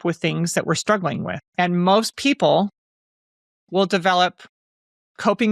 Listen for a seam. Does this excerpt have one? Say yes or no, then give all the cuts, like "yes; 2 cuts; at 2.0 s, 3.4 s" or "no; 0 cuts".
yes; 1 cut; at 1.4 s